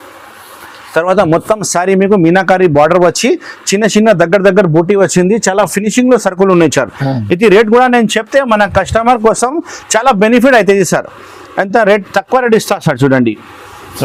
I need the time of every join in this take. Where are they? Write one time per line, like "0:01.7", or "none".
none